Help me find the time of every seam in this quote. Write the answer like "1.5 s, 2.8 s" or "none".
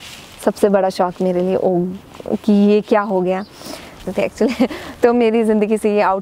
4.1 s